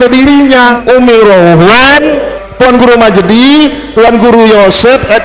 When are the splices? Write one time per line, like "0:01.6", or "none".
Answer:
0:00.8
0:02.4